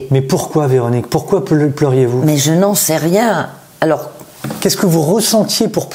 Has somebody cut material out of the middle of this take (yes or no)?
no